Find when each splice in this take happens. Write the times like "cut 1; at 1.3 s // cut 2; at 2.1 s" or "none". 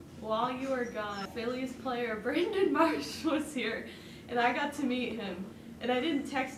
cut 1; at 1.3 s

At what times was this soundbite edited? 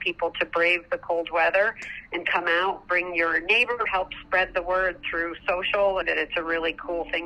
cut 1; at 3.9 s // cut 2; at 6.0 s

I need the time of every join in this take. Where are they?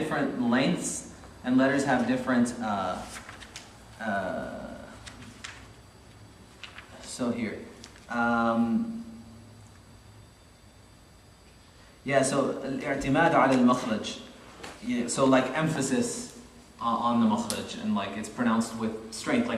none

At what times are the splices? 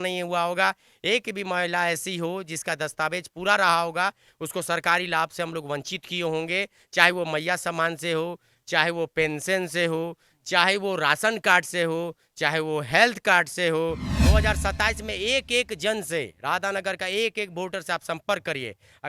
cut 1; at 14.1 s

